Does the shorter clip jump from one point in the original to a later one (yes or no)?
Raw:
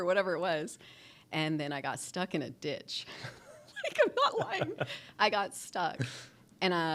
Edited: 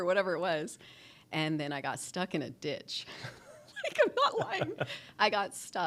no